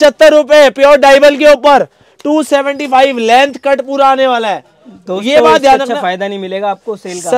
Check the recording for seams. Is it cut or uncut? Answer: uncut